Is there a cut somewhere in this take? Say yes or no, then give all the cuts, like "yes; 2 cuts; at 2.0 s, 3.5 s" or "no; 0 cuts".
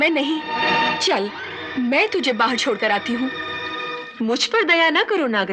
no; 0 cuts